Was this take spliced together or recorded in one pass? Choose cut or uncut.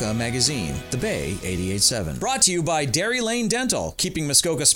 cut